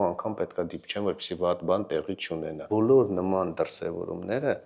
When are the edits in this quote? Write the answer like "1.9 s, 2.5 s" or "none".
2.6 s